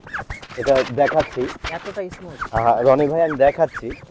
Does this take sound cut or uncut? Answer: uncut